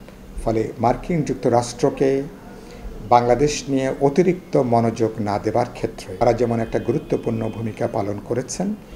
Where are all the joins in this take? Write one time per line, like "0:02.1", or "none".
0:06.2